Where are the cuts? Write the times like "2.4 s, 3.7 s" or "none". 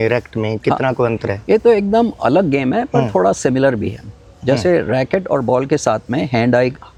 none